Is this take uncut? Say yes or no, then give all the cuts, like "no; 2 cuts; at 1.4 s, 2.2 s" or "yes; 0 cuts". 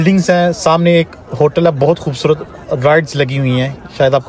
yes; 0 cuts